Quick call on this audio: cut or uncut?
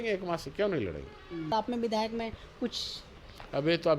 cut